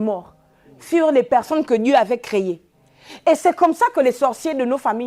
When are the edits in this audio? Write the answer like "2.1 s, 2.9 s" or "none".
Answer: none